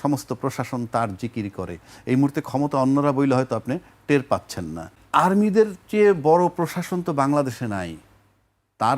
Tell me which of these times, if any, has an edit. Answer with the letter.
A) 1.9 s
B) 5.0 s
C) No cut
B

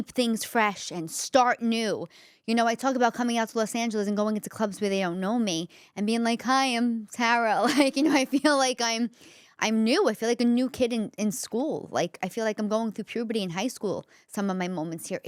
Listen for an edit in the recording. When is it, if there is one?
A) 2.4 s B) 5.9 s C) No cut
C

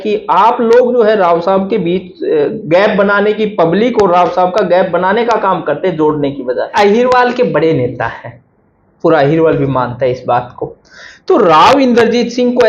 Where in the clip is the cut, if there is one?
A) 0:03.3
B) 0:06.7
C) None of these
B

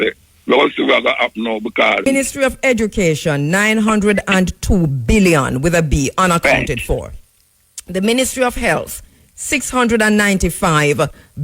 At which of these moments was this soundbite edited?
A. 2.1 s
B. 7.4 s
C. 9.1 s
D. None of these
A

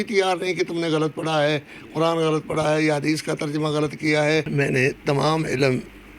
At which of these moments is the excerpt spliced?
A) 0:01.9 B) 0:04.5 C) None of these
B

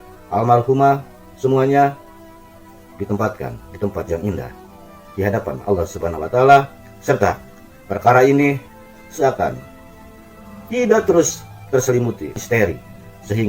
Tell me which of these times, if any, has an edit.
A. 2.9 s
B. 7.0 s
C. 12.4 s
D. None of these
C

